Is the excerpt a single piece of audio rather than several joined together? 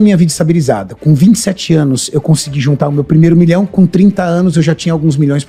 yes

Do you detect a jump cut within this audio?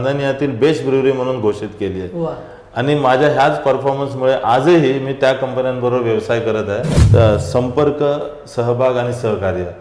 yes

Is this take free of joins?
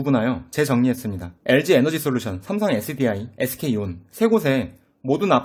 yes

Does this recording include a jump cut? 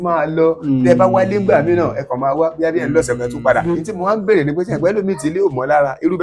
yes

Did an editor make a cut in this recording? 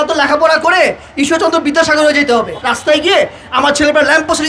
yes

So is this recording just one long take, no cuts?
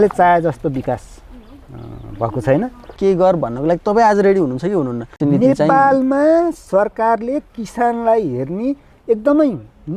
no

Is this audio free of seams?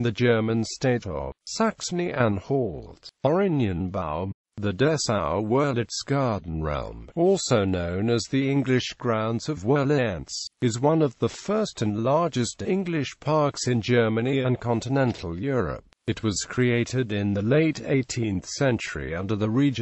yes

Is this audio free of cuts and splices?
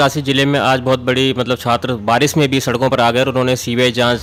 yes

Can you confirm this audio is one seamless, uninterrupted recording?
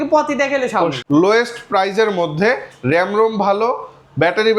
no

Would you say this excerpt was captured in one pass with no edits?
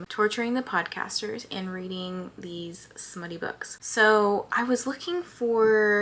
yes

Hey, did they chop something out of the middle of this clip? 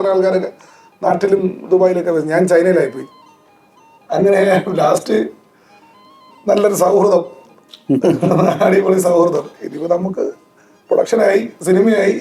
no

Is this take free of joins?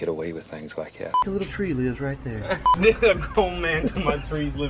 no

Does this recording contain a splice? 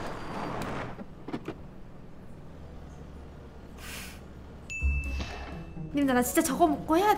no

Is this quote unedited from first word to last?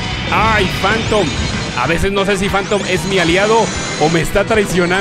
no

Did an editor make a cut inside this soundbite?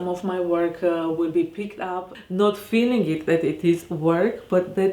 yes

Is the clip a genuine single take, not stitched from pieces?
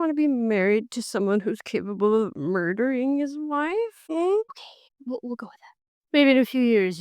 no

